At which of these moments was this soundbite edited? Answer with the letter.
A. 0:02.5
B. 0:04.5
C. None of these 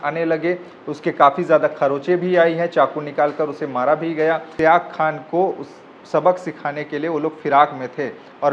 B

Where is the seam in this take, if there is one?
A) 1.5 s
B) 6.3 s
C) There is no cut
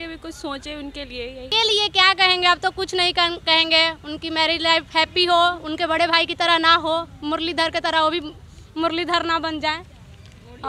A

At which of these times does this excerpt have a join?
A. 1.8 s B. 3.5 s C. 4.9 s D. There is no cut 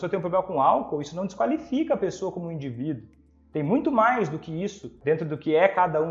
C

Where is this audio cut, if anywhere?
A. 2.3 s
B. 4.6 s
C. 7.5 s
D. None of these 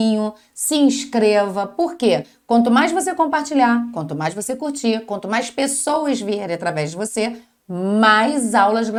D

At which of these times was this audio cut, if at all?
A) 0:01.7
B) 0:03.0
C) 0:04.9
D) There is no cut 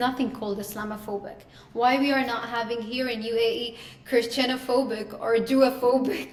D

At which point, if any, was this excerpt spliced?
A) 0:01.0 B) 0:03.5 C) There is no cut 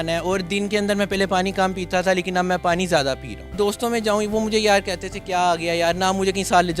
B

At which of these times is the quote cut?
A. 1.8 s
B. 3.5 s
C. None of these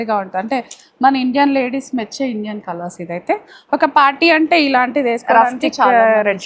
C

